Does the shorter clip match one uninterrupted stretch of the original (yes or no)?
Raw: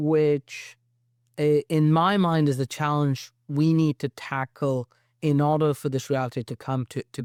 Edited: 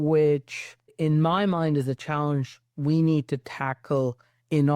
no